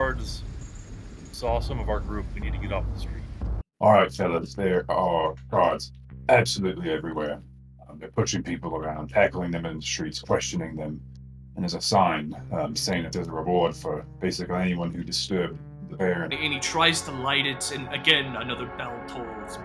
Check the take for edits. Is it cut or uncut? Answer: cut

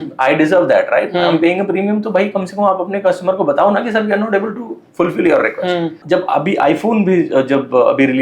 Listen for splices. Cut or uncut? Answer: cut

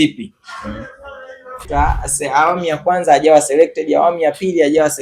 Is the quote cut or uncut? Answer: cut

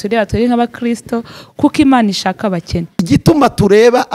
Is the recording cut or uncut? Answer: cut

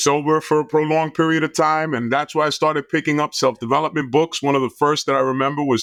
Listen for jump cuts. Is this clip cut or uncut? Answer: uncut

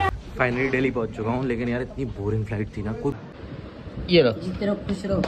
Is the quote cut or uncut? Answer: cut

